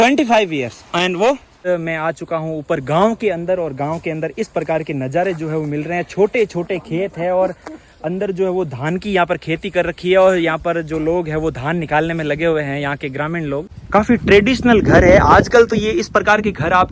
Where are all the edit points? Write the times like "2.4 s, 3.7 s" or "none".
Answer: 1.7 s, 13.8 s